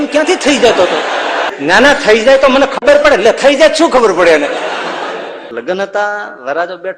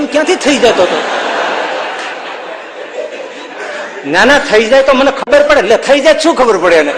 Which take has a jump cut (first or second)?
first